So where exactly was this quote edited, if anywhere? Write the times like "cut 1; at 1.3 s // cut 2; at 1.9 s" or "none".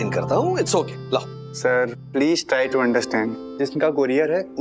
cut 1; at 3.4 s